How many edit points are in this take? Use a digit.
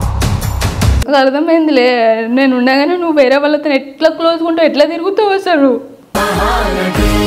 1